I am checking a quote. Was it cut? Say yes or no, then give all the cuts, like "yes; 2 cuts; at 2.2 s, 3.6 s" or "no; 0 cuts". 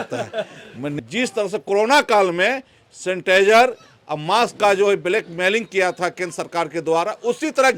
yes; 1 cut; at 0.9 s